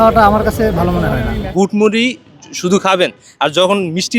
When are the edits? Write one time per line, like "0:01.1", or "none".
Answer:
0:01.4